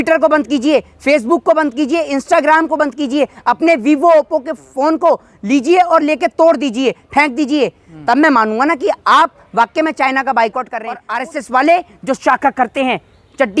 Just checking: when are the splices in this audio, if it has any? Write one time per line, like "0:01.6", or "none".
0:11.1